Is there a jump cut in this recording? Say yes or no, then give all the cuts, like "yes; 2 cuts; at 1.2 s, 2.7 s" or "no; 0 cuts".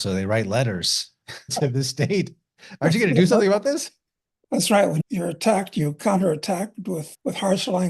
no; 0 cuts